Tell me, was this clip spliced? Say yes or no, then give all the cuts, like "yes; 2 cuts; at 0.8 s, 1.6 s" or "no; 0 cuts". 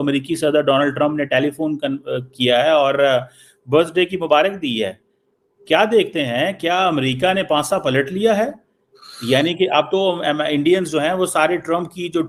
no; 0 cuts